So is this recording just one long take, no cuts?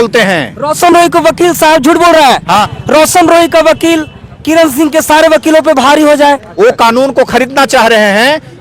no; 2 cuts; at 2.7 s, 6.5 s

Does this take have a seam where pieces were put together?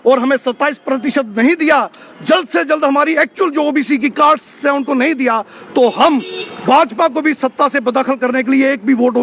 no; 0 cuts

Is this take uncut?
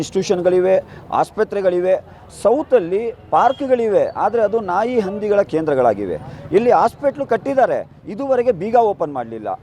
yes; 0 cuts

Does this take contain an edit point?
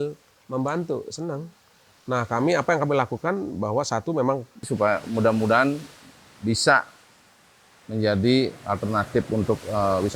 yes; 1 cut; at 4.7 s

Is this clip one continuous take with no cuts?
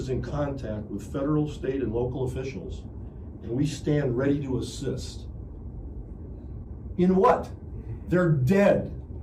yes; 0 cuts

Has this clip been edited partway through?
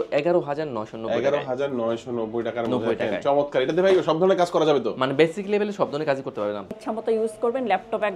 yes; 1 cut; at 6.7 s

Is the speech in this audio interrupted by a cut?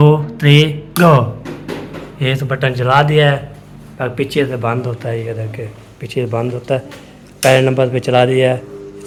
no; 0 cuts

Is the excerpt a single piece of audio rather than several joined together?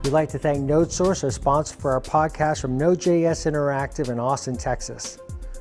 yes; 0 cuts

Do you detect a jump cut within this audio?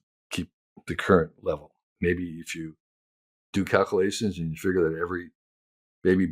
yes; 1 cut; at 1.9 s

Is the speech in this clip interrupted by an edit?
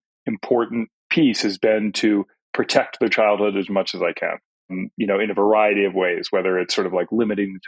no; 0 cuts

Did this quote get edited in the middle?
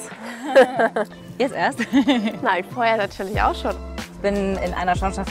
yes; 2 cuts; at 1.1 s, 3.8 s

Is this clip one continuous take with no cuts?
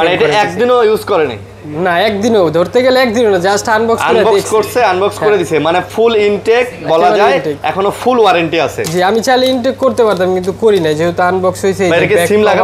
yes; 0 cuts

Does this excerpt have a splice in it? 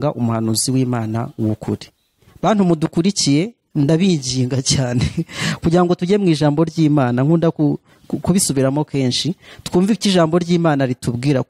no; 0 cuts

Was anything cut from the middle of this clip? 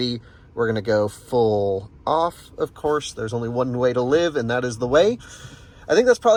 no; 0 cuts

